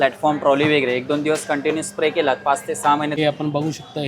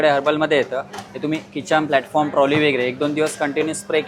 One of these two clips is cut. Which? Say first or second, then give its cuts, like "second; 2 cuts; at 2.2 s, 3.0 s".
first; 1 cut; at 3.1 s